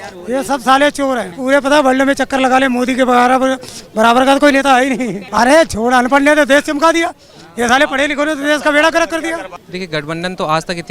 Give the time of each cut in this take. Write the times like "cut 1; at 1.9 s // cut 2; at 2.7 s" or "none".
cut 1; at 1.3 s // cut 2; at 5.2 s // cut 3; at 9.5 s